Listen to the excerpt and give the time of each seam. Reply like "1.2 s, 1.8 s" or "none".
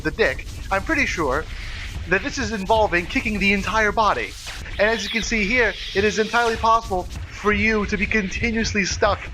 4.6 s

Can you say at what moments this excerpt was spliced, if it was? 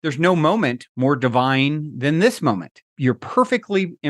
2.9 s

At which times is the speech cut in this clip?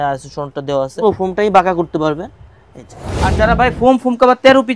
1.0 s, 3.3 s

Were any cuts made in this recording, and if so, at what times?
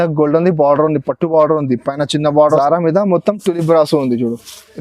2.5 s

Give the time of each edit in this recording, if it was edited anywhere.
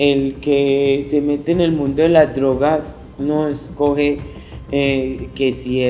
none

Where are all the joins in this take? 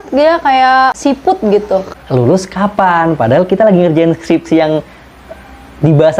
1.0 s, 1.9 s

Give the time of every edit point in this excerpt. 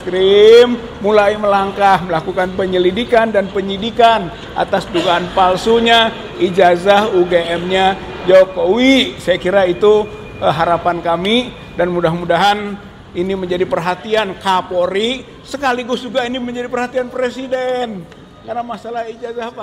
none

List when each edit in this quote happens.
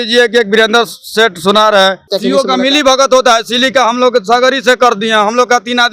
2.1 s

